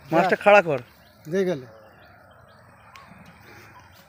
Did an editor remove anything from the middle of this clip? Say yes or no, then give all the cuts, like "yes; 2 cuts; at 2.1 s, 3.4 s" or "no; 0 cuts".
no; 0 cuts